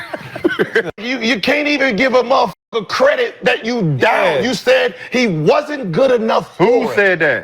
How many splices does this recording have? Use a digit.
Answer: 1